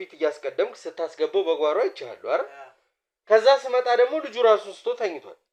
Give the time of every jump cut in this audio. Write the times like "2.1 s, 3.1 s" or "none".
none